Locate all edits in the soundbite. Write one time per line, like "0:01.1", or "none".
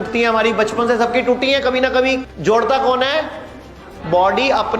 0:02.3